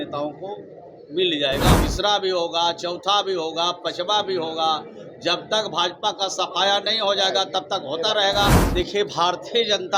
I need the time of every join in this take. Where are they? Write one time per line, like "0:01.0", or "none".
0:01.8
0:08.6